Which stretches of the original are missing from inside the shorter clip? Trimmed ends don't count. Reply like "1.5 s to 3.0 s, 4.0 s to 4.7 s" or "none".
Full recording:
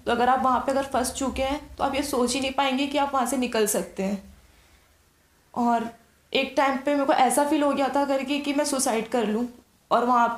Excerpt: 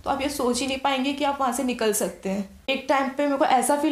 4.3 s to 6.3 s

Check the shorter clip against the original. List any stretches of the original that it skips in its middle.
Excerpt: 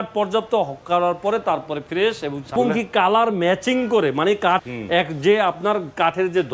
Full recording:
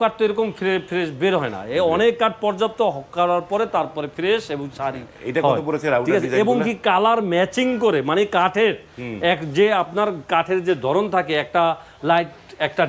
4.8 s to 6.5 s, 8.5 s to 8.9 s

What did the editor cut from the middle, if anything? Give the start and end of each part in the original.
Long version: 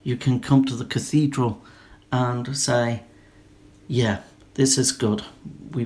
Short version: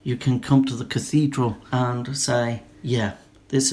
1.6 s to 2.0 s, 3.1 s to 3.8 s

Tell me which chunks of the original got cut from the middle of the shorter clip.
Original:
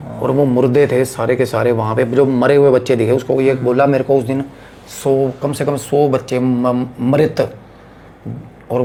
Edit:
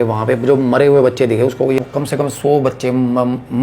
3.5 s to 5.3 s

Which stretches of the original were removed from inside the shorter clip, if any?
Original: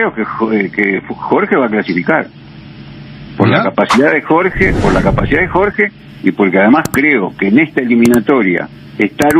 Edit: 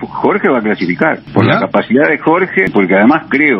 2.3 s to 3.3 s, 4.7 s to 6.3 s

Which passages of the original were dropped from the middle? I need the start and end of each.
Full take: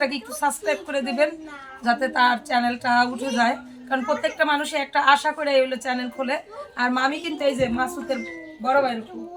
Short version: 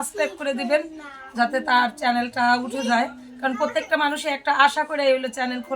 none

